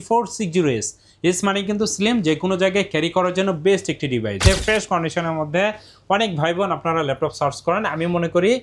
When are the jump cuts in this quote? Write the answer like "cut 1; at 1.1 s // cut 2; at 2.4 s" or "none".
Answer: cut 1; at 4.4 s